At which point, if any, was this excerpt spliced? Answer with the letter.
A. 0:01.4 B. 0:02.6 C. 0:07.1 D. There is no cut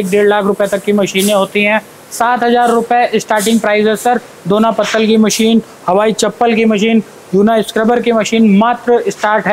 D